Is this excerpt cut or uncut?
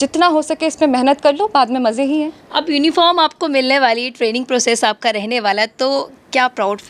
uncut